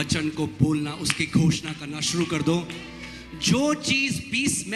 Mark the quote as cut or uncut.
uncut